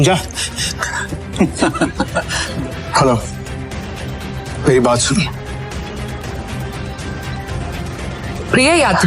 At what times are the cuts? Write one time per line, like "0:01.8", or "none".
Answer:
0:02.4
0:06.2

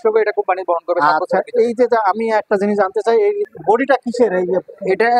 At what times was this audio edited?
none

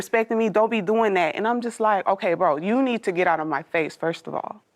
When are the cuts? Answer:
none

